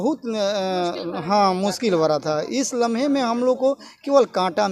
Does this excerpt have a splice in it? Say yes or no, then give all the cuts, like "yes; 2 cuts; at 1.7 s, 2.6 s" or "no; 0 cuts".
no; 0 cuts